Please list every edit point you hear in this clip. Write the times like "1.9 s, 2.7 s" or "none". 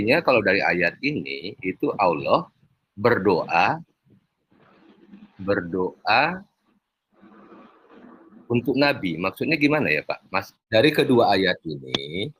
10.5 s